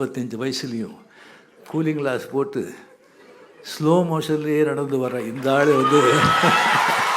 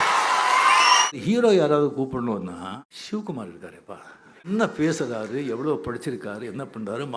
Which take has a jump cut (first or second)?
second